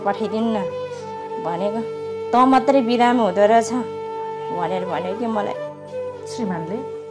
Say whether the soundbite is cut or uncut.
uncut